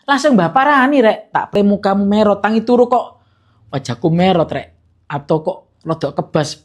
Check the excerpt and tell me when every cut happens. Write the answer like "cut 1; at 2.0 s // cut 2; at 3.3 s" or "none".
cut 1; at 1.5 s